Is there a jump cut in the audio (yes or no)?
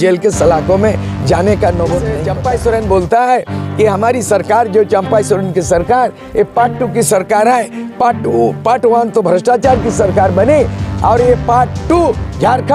yes